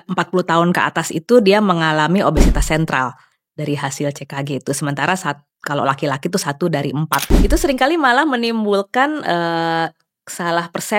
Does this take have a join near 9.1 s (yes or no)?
no